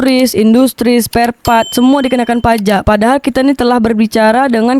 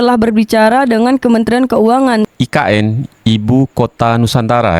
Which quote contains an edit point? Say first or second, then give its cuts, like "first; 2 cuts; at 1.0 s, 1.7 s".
second; 1 cut; at 2.3 s